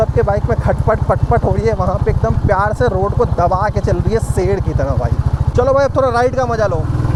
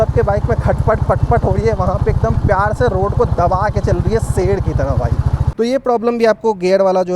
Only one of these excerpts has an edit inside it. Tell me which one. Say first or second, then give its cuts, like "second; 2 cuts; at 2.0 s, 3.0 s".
second; 1 cut; at 5.4 s